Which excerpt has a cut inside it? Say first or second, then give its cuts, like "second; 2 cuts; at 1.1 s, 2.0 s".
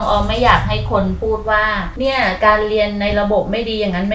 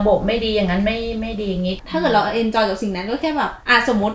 second; 1 cut; at 1.8 s